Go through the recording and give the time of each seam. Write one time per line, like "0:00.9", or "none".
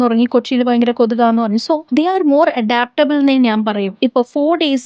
0:01.8
0:03.9